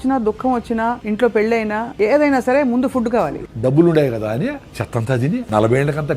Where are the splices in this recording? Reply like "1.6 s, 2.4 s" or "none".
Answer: 1.0 s, 1.9 s, 3.3 s, 5.3 s